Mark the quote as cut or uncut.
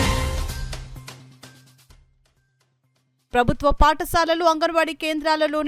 uncut